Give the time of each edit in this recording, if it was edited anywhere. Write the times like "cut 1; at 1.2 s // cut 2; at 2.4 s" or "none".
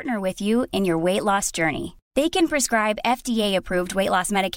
none